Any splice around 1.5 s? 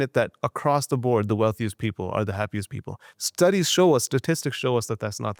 no; 0 cuts

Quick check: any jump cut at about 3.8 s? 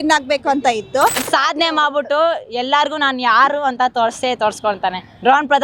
no; 1 cut; at 1.2 s

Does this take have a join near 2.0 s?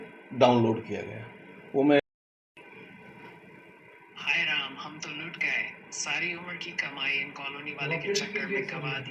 yes; 1 cut; at 2.0 s

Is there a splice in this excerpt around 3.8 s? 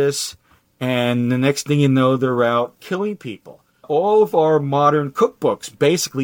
yes; 1 cut; at 3.8 s

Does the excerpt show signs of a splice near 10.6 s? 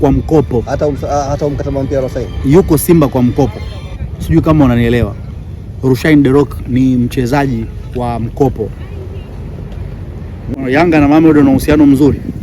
yes; 1 cut; at 10.6 s

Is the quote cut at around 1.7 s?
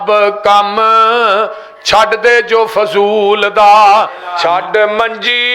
no; 1 cut; at 4.2 s

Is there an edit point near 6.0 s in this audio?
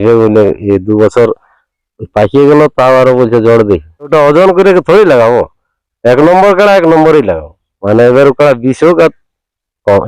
no; 1 cut; at 4.1 s

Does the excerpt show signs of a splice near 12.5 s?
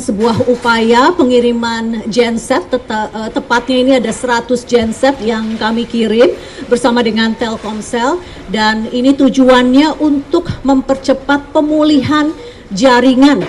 no; 0 cuts

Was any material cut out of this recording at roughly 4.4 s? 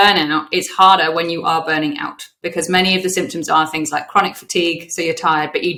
no; 0 cuts

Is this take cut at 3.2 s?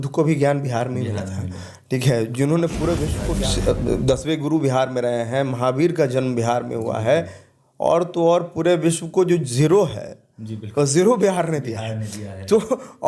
yes; 1 cut; at 3.2 s

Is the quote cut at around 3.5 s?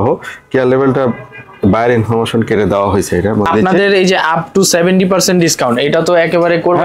yes; 1 cut; at 3.5 s

